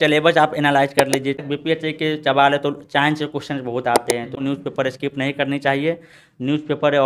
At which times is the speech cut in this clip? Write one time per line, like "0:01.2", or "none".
0:01.4
0:04.3